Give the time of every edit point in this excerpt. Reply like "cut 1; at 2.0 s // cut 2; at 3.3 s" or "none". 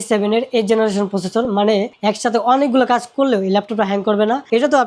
none